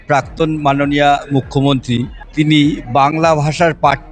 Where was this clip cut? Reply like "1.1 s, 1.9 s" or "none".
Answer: 2.2 s